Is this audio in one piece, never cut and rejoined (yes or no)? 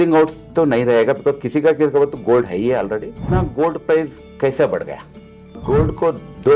no